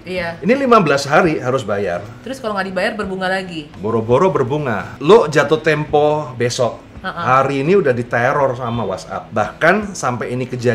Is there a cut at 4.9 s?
yes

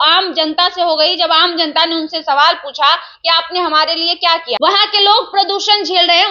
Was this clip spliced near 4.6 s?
yes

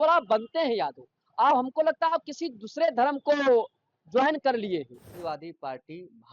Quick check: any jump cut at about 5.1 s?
yes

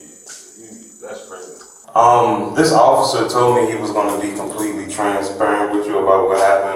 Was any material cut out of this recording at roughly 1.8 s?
yes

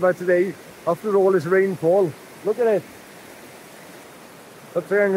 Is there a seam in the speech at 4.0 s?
yes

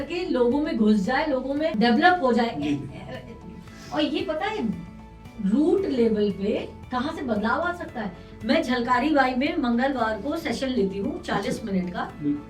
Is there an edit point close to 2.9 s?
no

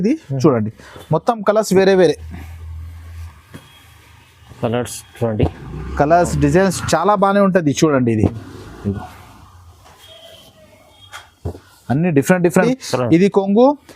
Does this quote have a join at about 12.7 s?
yes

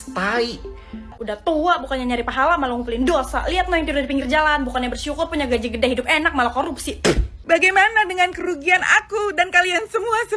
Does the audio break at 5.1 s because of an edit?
no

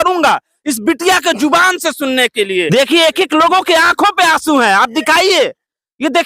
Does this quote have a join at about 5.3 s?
no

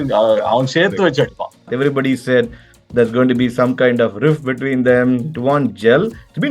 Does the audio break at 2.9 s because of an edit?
no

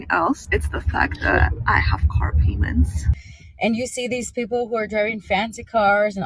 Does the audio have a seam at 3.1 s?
yes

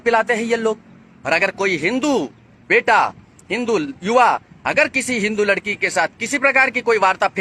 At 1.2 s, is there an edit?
no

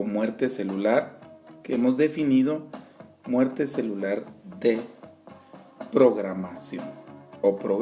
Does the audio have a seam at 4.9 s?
yes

